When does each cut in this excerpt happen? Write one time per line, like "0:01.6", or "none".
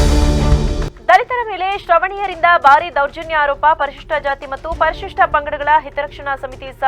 none